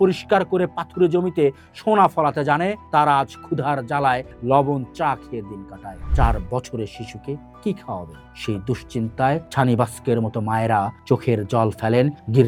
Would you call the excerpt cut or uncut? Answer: uncut